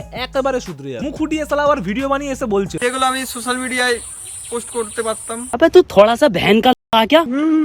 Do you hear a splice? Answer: no; 0 cuts

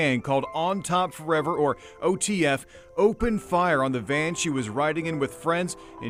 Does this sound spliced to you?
no; 0 cuts

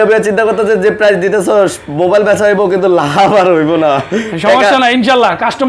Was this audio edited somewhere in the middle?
no; 0 cuts

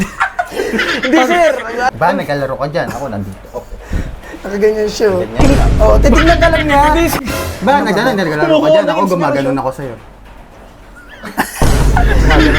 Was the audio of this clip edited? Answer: yes; 2 cuts; at 1.9 s, 7.2 s

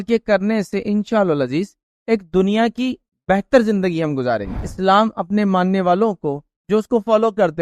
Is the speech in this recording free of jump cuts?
no; 1 cut; at 4.7 s

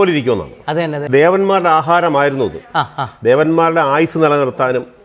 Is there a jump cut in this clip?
yes; 1 cut; at 1.0 s

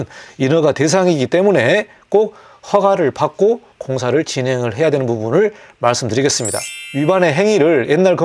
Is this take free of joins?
no; 1 cut; at 6.9 s

